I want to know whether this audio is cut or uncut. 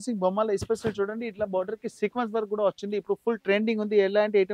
uncut